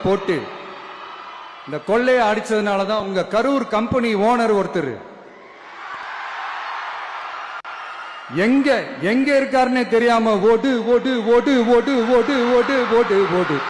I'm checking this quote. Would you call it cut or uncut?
uncut